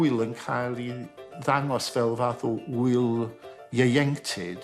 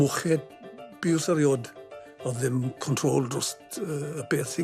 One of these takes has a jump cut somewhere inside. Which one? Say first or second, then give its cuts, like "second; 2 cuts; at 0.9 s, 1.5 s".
first; 1 cut; at 1.2 s